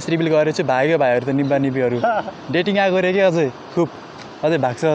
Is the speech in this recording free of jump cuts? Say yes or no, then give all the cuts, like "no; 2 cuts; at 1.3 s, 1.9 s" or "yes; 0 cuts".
yes; 0 cuts